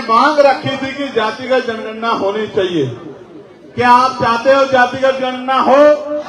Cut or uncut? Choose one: uncut